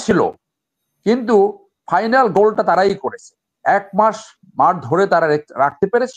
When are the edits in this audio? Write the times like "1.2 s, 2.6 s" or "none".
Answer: none